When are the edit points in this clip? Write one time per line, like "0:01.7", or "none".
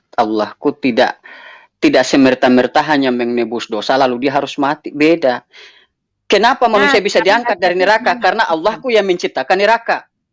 none